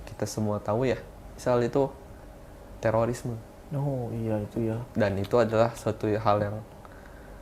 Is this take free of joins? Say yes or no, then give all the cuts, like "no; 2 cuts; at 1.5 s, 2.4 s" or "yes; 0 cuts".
yes; 0 cuts